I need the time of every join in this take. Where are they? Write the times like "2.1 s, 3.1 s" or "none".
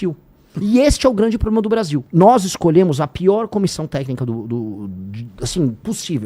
2.0 s